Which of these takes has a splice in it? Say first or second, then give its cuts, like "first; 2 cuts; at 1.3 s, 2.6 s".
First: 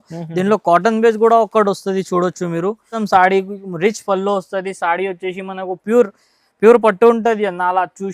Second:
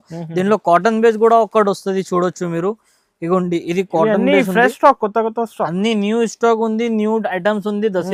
first; 1 cut; at 2.9 s